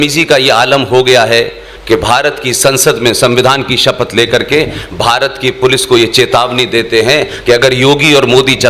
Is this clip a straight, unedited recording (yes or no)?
yes